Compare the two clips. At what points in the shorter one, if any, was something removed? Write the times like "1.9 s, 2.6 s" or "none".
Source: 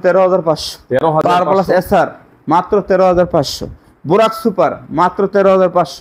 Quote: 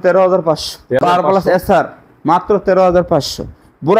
1.0 s